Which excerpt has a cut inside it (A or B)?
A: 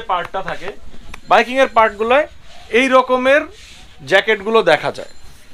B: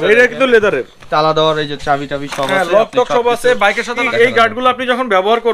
B